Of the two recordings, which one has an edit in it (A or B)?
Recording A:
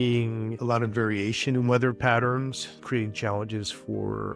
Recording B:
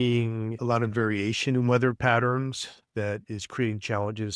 A